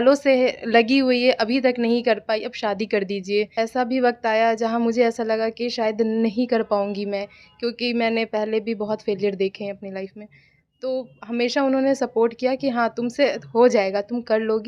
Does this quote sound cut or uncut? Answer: cut